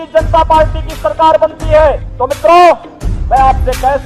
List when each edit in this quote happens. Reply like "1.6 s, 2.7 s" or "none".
none